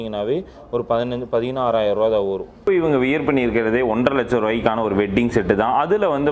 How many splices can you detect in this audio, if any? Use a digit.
1